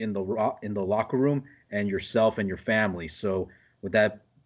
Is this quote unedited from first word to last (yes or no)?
yes